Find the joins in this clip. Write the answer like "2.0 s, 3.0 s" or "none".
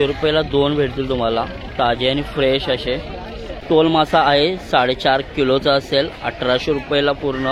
3.6 s